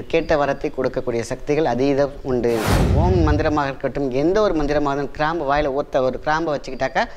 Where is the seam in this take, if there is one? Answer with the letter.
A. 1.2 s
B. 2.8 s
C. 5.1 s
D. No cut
B